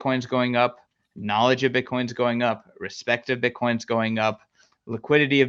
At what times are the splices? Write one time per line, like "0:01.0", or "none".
none